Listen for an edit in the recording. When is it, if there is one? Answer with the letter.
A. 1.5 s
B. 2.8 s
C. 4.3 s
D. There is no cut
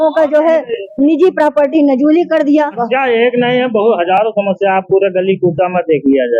B